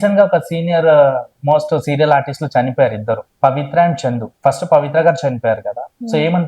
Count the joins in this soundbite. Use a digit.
2